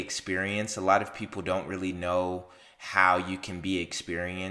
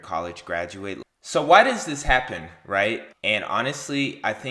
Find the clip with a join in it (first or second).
second